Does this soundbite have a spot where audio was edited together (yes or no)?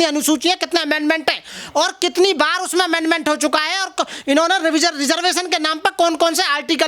no